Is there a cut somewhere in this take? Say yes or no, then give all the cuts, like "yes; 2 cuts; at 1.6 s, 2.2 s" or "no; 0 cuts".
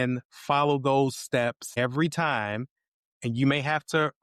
yes; 1 cut; at 1.6 s